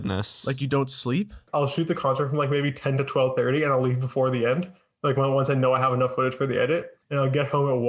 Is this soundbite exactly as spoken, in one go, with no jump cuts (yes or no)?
no